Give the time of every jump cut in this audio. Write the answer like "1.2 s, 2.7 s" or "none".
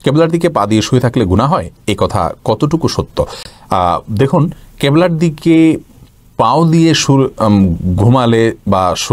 none